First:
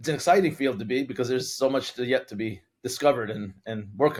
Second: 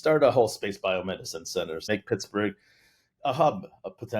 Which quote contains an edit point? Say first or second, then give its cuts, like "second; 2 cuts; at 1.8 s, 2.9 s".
second; 1 cut; at 1.9 s